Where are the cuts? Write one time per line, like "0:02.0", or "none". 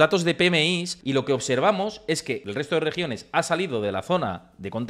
0:00.9
0:02.3